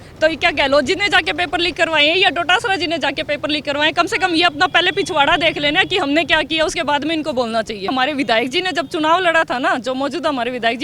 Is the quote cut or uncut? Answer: cut